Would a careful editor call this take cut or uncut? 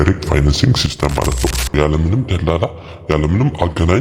cut